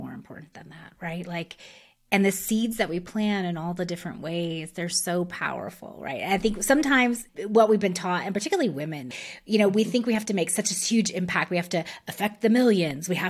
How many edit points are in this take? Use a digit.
1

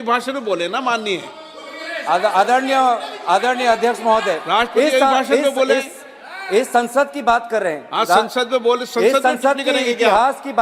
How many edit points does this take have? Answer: 0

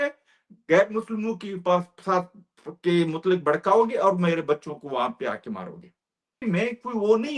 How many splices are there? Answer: 1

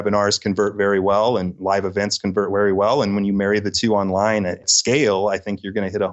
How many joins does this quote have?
0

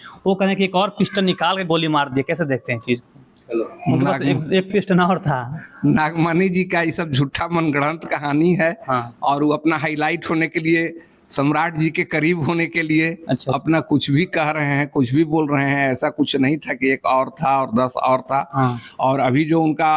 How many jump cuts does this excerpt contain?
0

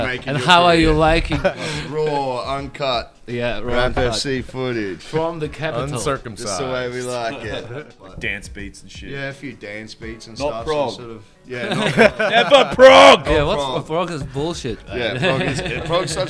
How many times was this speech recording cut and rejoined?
2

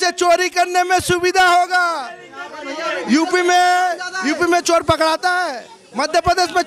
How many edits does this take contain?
0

